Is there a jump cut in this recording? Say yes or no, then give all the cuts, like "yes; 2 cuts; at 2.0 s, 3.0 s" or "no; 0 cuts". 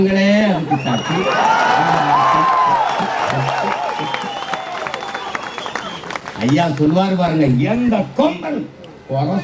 no; 0 cuts